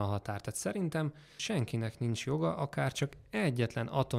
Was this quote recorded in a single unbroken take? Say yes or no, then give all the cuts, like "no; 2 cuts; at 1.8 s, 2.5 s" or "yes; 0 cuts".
no; 1 cut; at 1.4 s